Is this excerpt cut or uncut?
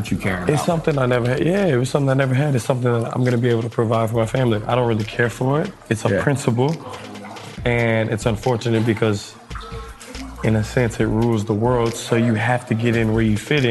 uncut